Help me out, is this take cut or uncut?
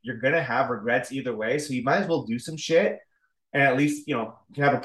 uncut